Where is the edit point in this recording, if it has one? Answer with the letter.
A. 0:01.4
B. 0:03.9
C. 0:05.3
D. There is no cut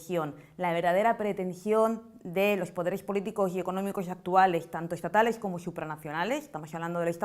C